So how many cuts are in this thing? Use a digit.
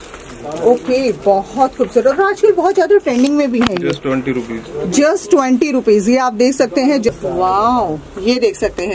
1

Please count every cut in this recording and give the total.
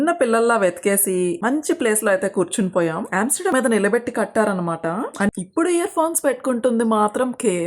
2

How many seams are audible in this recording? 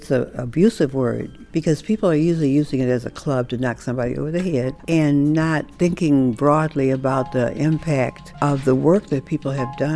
3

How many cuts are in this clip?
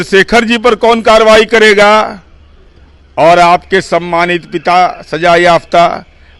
0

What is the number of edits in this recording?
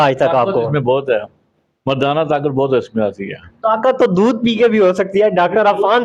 0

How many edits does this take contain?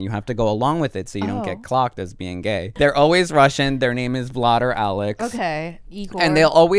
1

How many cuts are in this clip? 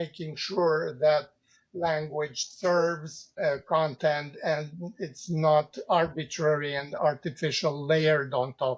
1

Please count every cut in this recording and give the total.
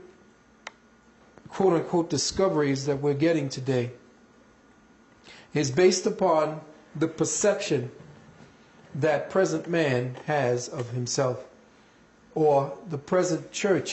1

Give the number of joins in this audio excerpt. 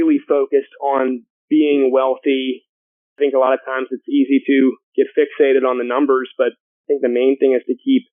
4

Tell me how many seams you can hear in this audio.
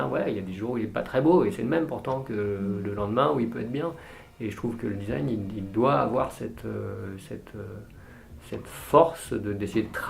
0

